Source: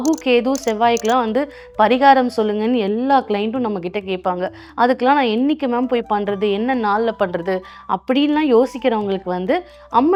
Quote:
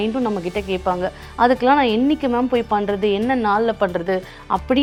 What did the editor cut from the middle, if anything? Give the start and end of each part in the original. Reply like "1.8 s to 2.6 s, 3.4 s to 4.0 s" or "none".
none